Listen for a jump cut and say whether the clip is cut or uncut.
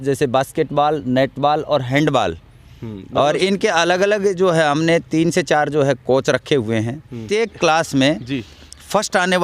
cut